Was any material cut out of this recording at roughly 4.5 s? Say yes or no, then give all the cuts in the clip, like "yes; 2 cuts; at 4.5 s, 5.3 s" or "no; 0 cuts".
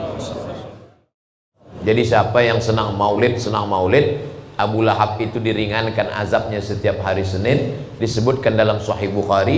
no; 1 cut; at 1.4 s